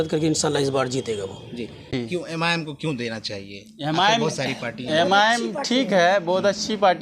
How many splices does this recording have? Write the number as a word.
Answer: one